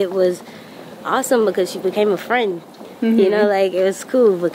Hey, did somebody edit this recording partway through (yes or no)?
no